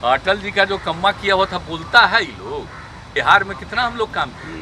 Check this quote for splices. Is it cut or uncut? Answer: cut